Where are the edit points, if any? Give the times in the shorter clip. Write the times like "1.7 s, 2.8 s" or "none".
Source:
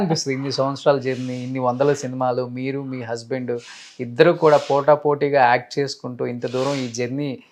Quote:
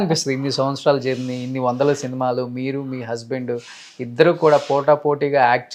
none